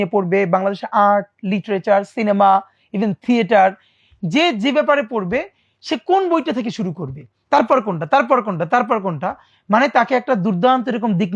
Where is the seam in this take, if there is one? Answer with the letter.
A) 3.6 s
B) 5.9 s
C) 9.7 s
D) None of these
D